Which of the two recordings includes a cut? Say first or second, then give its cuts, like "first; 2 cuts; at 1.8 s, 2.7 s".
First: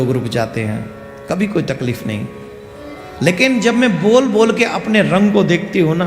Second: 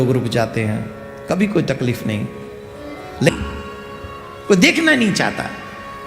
second; 1 cut; at 3.3 s